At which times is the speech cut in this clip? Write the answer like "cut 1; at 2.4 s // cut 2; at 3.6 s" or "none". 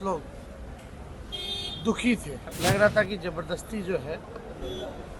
cut 1; at 2.5 s